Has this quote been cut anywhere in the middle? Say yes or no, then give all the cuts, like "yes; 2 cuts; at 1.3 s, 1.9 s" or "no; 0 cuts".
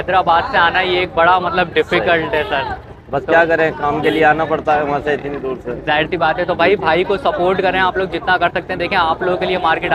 no; 0 cuts